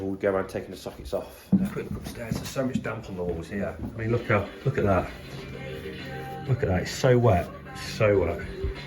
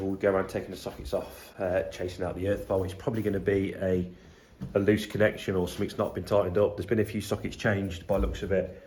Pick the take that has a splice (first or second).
first